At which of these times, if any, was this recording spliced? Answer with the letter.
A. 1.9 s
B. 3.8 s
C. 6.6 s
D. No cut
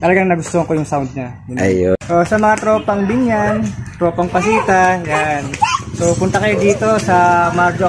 A